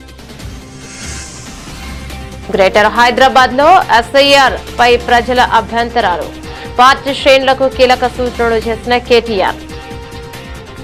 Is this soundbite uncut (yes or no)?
yes